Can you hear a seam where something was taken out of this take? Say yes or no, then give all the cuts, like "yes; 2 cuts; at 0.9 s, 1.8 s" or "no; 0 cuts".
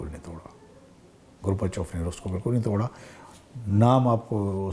no; 0 cuts